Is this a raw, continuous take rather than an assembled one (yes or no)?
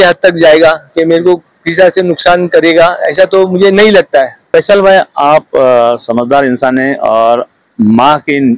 no